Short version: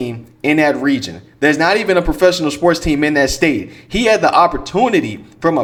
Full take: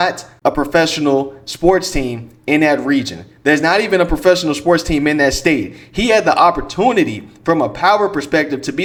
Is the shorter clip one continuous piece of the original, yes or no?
yes